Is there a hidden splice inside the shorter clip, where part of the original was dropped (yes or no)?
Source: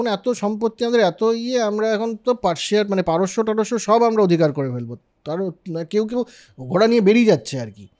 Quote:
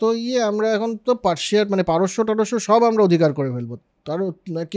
no